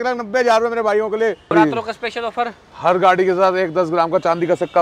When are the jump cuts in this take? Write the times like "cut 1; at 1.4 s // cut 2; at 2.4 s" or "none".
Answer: cut 1; at 1.5 s